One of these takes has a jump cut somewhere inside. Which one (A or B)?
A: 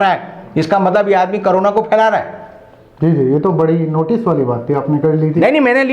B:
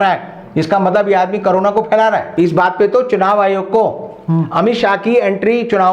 B